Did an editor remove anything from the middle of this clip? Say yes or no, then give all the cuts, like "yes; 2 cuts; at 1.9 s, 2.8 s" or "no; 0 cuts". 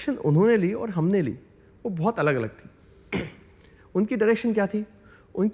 no; 0 cuts